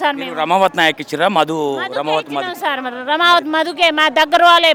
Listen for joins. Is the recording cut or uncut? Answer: uncut